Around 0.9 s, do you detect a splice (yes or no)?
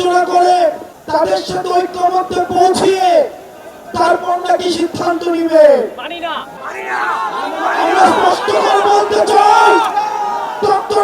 yes